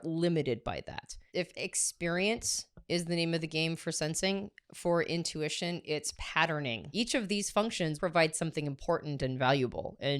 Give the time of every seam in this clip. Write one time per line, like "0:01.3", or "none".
0:01.2
0:06.9
0:08.0